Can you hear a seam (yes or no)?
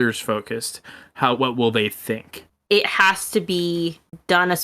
yes